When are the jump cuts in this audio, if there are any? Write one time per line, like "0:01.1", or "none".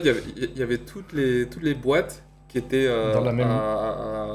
none